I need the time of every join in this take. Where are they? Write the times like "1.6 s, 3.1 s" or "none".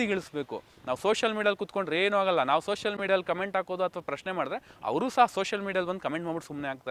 none